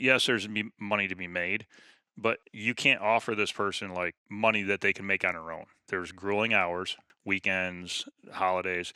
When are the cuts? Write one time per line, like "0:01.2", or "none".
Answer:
0:02.4
0:04.2
0:05.8
0:07.0

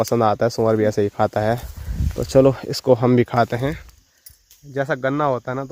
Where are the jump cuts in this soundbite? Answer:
none

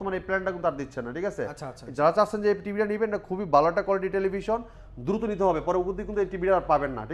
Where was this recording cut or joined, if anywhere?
none

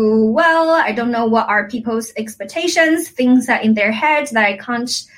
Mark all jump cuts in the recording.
none

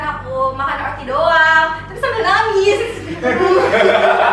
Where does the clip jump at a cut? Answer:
none

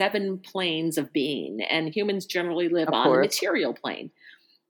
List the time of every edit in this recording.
none

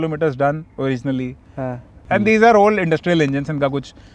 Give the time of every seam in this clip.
0:02.0

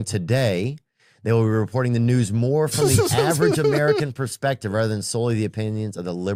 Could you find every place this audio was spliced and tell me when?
none

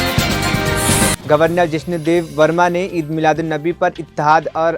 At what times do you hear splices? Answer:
0:01.2

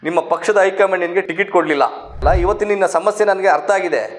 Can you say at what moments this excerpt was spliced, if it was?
0:01.3
0:02.2

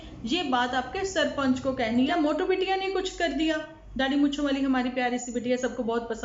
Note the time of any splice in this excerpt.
0:02.1

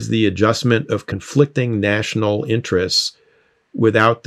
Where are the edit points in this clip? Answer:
0:01.2

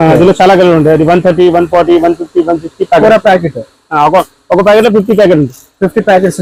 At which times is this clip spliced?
none

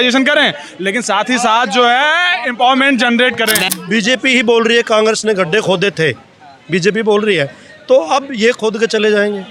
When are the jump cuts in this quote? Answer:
0:03.7

